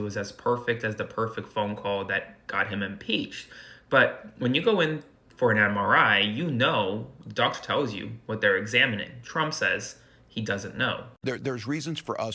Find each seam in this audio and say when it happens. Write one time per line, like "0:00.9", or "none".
0:11.2